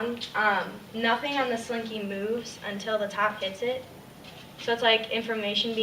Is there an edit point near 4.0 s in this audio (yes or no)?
yes